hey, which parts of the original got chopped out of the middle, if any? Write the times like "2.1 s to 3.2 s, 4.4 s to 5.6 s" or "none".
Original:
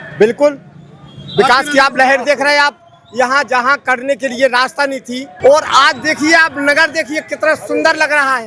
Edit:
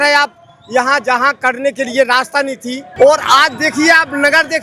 none